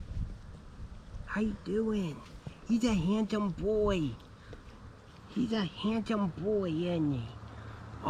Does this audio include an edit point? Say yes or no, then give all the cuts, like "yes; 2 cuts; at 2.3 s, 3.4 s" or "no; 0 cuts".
no; 0 cuts